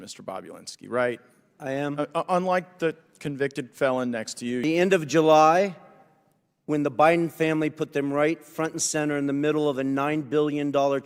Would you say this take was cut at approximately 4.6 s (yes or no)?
yes